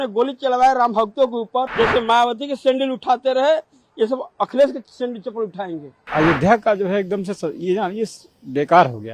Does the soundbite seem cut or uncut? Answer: cut